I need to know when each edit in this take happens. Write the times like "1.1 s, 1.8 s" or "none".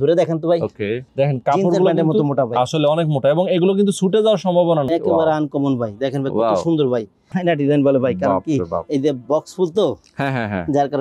1.0 s, 4.8 s, 7.2 s